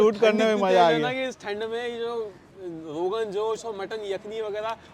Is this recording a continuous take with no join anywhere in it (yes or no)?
yes